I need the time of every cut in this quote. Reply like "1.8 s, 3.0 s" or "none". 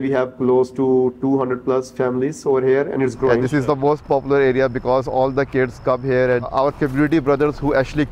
3.4 s, 6.5 s